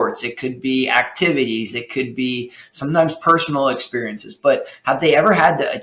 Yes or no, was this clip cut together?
no